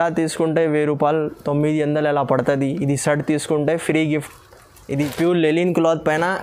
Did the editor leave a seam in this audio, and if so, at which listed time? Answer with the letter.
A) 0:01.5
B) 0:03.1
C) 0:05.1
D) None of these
C